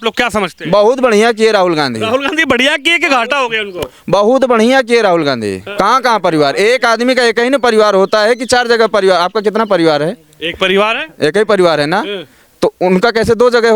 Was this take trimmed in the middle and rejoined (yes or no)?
yes